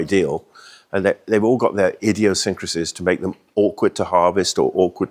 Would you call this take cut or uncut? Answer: uncut